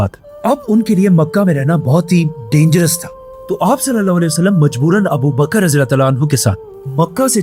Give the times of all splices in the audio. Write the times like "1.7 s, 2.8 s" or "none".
none